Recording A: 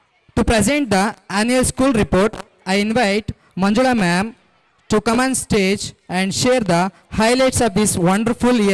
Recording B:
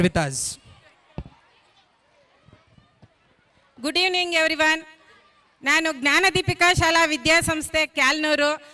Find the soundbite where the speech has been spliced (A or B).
B